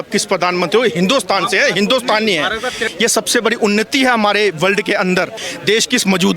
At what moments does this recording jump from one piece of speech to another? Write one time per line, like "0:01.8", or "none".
0:02.9
0:05.5